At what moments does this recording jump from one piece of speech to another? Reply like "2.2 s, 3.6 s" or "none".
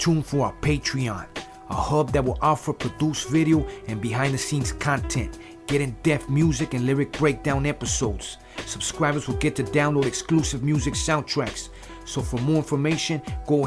none